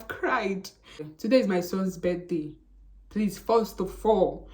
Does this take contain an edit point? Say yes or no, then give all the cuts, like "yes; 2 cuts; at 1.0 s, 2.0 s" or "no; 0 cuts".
yes; 1 cut; at 1.1 s